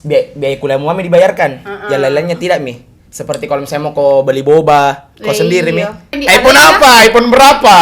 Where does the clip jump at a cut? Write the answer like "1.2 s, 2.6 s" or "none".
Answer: 6.2 s